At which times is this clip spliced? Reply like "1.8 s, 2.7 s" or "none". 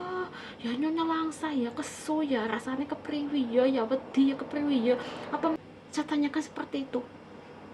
5.6 s